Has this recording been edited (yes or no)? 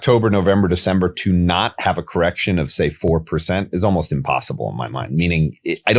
no